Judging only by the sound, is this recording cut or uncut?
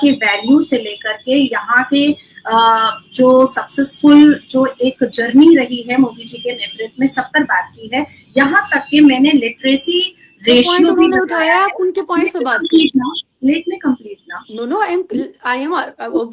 uncut